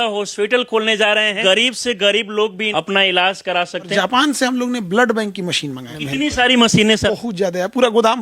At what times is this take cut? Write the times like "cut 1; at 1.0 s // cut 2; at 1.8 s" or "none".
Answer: cut 1; at 1.4 s // cut 2; at 2.6 s // cut 3; at 3.9 s // cut 4; at 5.9 s // cut 5; at 7.1 s